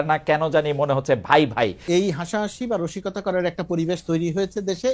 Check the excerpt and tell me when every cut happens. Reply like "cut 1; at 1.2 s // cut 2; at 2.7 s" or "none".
cut 1; at 1.8 s